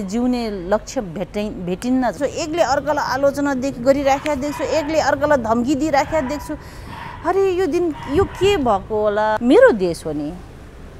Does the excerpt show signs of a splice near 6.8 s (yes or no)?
no